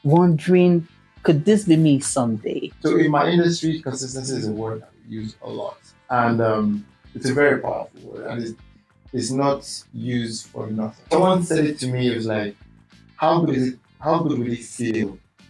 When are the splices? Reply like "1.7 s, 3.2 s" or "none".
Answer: 2.7 s, 11.1 s